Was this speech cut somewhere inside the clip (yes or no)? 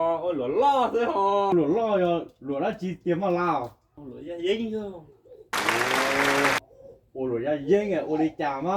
yes